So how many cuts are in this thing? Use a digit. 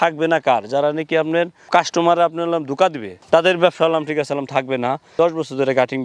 1